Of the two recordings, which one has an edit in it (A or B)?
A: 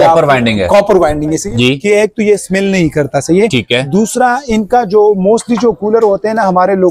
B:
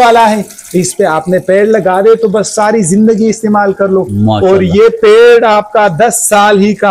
A